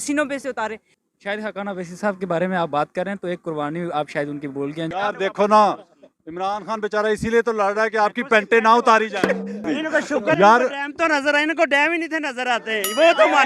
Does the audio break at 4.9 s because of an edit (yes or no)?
yes